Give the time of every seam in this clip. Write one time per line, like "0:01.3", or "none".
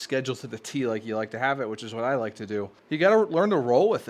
0:02.8